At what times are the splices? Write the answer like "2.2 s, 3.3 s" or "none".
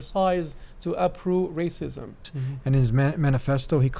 2.2 s